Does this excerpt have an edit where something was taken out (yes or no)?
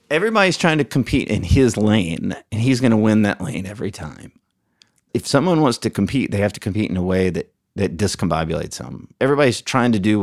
yes